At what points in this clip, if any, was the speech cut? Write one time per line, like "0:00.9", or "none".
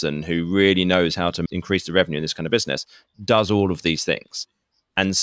0:01.4